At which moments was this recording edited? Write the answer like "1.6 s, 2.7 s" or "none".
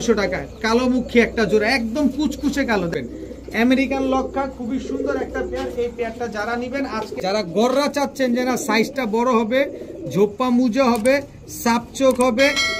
2.9 s, 7.1 s